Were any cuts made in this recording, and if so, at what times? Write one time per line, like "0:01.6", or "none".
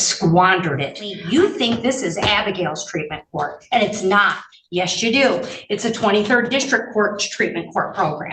0:01.1